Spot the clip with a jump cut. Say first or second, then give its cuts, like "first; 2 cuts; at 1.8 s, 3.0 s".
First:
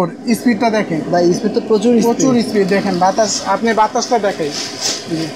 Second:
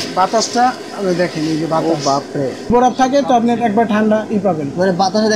second; 1 cut; at 2.7 s